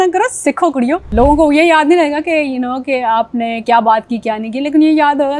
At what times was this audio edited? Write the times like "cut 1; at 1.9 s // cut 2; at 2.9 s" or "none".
cut 1; at 1.1 s